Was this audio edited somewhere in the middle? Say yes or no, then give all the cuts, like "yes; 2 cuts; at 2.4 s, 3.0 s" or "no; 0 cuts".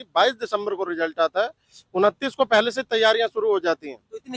no; 0 cuts